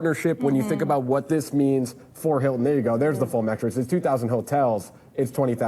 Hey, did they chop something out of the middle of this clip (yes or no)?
no